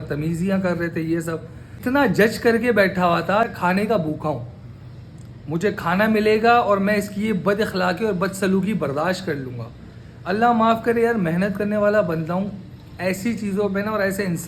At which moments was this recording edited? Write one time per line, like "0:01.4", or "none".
0:01.7
0:03.5